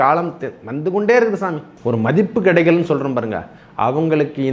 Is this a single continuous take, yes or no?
no